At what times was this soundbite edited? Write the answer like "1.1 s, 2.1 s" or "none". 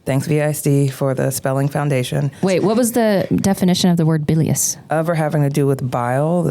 2.4 s